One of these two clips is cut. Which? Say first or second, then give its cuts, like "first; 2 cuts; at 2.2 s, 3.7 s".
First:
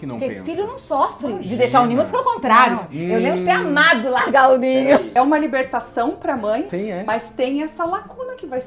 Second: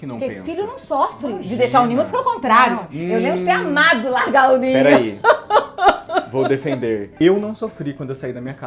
first; 2 cuts; at 5.1 s, 6.7 s